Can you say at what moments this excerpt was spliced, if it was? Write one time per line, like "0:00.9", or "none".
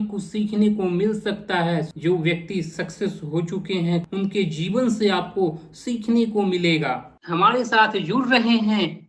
0:01.9
0:04.0
0:07.2